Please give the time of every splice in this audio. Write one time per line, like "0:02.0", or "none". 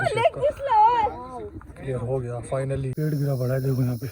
0:02.9